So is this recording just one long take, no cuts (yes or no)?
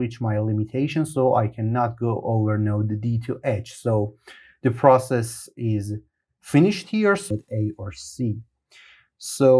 no